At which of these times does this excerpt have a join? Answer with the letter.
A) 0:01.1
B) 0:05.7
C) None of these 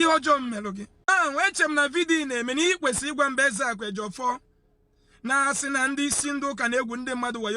A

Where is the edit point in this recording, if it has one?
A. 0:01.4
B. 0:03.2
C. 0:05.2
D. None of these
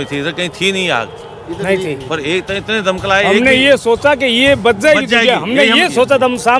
D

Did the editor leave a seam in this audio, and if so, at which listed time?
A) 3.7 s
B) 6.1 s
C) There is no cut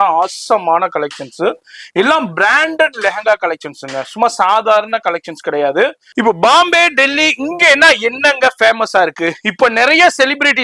B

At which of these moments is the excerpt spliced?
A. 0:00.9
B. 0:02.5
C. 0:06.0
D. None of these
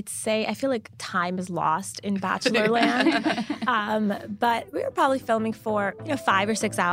C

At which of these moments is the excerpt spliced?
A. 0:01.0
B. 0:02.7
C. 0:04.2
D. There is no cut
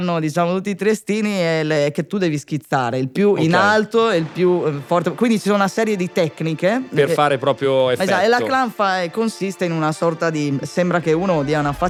D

